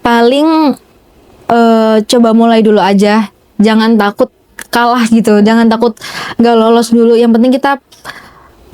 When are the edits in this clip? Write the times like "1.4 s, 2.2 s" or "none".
none